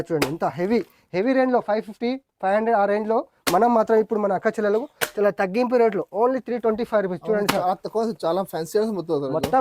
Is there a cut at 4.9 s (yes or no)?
no